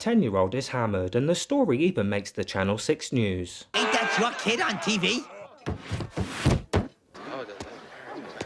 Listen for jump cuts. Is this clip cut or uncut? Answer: uncut